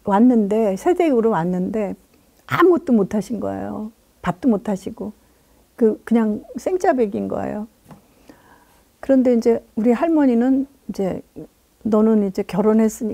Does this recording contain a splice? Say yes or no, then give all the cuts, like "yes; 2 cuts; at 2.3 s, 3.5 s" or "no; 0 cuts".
no; 0 cuts